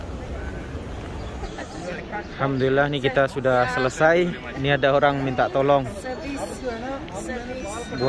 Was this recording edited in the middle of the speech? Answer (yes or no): yes